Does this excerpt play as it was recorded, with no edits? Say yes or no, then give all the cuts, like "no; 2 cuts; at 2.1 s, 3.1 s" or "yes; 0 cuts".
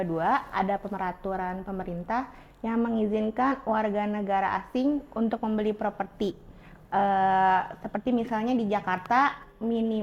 yes; 0 cuts